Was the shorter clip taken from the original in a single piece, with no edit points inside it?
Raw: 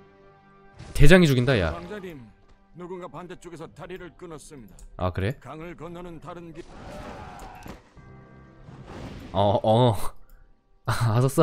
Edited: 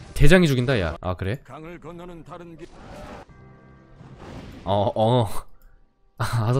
no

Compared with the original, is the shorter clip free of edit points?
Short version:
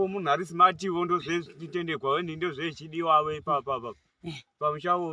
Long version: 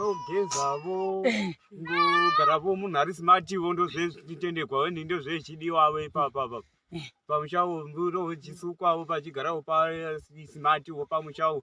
yes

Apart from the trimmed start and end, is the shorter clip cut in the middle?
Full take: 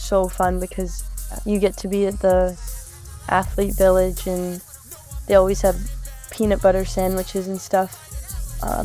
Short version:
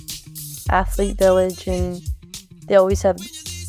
no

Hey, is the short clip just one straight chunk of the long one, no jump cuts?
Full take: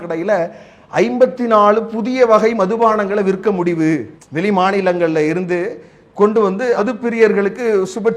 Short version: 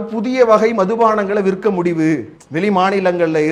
yes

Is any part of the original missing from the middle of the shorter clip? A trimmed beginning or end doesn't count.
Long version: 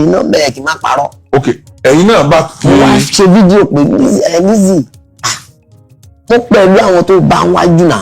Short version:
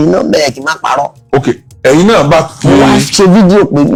no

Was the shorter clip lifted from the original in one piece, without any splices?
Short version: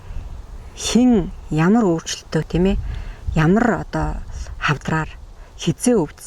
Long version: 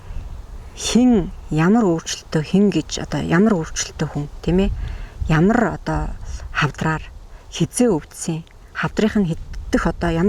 no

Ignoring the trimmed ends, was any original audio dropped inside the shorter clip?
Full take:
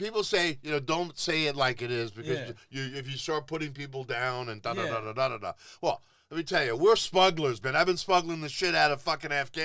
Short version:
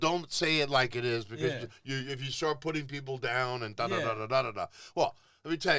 no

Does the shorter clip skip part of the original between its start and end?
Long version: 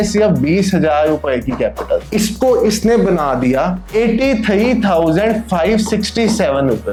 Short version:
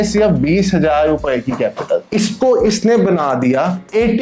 no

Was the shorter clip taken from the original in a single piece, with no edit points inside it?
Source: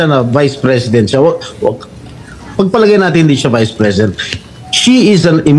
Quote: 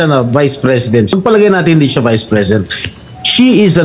no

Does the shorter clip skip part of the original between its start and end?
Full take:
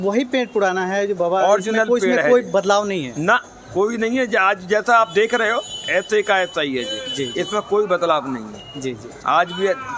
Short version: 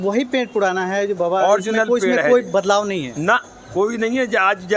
no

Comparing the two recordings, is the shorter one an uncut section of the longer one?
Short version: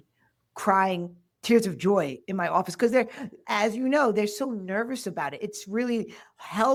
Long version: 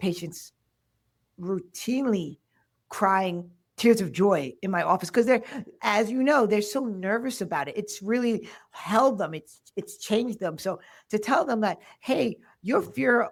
yes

